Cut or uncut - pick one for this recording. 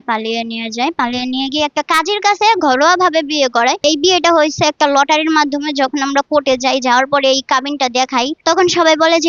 cut